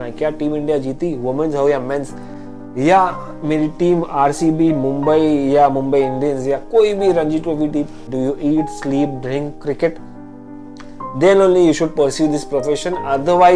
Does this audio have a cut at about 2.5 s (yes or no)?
no